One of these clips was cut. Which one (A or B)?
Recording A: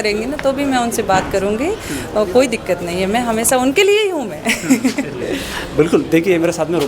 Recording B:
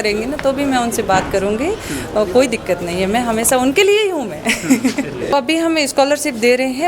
B